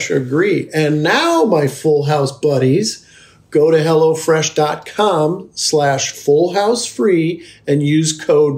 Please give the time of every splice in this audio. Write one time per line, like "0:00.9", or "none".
none